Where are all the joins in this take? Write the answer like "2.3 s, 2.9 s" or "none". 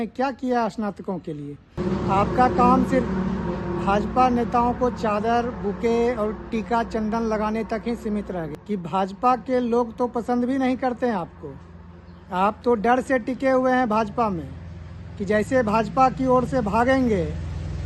1.8 s, 8.5 s